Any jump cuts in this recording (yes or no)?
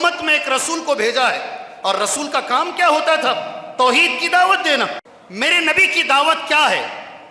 yes